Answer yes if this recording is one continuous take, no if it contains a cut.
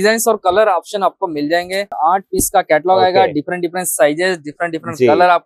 no